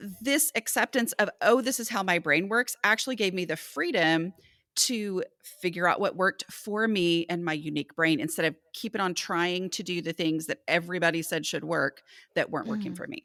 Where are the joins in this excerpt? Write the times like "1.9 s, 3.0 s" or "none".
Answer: none